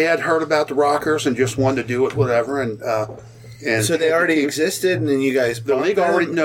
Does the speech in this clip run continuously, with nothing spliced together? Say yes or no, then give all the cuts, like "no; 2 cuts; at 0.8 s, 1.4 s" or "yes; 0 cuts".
yes; 0 cuts